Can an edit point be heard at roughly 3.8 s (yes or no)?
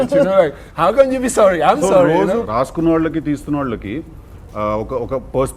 no